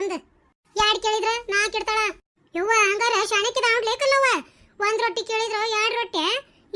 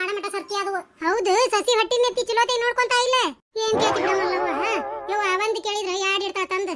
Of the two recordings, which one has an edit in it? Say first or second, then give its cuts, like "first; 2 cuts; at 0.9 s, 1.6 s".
second; 1 cut; at 0.9 s